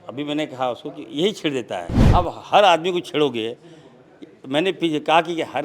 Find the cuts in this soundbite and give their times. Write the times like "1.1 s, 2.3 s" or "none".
2.0 s